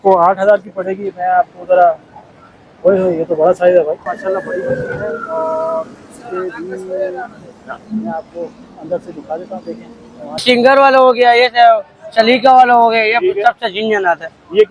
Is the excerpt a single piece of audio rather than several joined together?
no; 2 cuts; at 4.1 s, 10.4 s

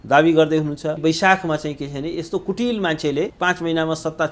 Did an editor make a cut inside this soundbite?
yes; 2 cuts; at 1.0 s, 3.3 s

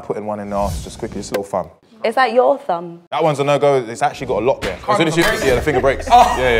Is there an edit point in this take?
yes; 2 cuts; at 3.2 s, 4.8 s

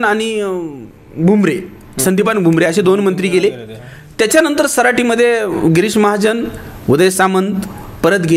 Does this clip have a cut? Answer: no; 0 cuts

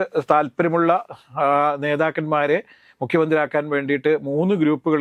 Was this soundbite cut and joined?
no; 0 cuts

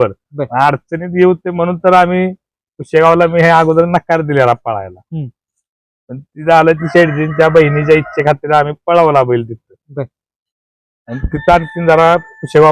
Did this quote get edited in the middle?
no; 0 cuts

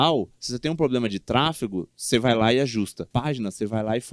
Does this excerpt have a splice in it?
yes; 1 cut; at 3.0 s

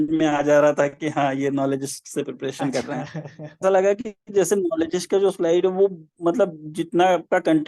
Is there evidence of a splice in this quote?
yes; 1 cut; at 3.6 s

